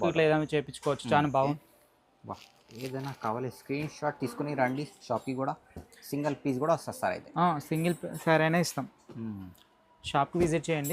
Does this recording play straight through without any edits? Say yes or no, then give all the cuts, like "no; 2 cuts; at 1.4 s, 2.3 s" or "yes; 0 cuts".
no; 1 cut; at 1.6 s